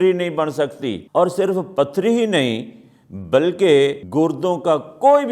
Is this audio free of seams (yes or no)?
no